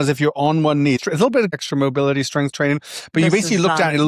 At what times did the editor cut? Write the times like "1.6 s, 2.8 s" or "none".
1.4 s